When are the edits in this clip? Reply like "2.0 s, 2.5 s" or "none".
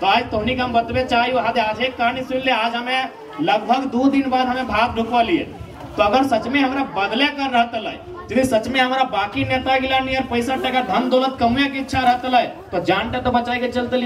none